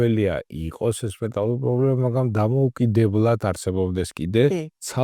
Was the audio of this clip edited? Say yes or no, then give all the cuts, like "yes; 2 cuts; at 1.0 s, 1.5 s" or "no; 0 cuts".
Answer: no; 0 cuts